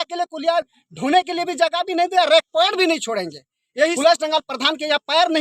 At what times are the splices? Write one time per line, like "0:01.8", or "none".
0:04.0